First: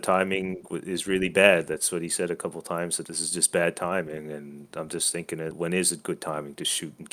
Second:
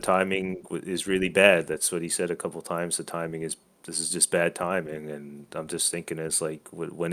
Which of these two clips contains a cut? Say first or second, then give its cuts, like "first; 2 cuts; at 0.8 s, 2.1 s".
first; 2 cuts; at 3.0 s, 5.5 s